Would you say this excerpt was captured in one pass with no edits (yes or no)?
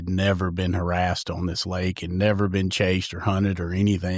yes